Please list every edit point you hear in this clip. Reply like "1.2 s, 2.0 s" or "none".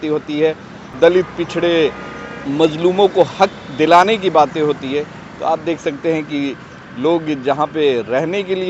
0.9 s